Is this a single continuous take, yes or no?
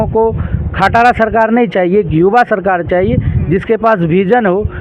yes